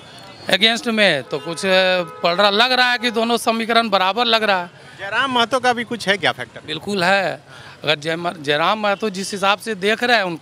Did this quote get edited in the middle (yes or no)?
no